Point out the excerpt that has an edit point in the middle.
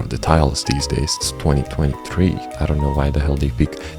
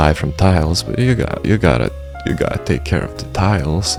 first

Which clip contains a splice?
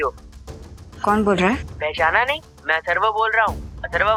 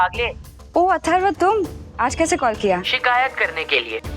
second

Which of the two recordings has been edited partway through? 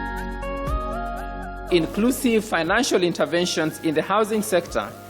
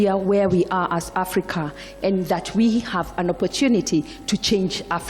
first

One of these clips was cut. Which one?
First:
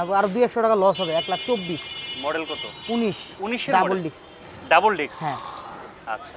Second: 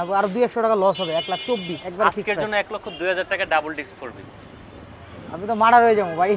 second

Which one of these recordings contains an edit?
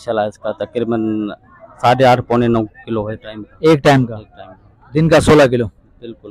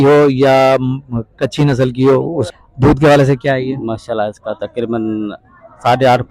second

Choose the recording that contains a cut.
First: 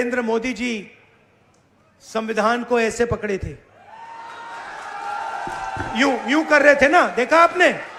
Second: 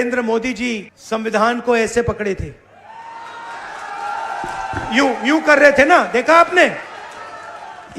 second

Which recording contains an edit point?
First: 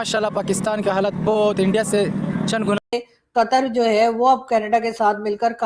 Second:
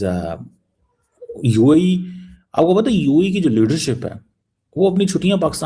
first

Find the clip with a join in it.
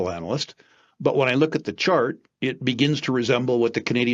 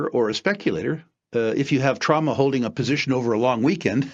second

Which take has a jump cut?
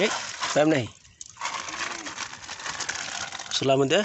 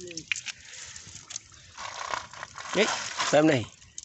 second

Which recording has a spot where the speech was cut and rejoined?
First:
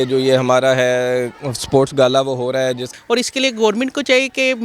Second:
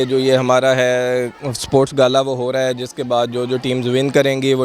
first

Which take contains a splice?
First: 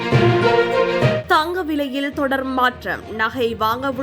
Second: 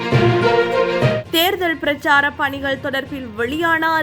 first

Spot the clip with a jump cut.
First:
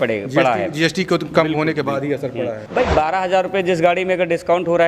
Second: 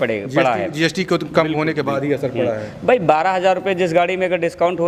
first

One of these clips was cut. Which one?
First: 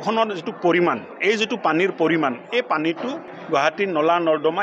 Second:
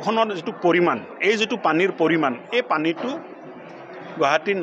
first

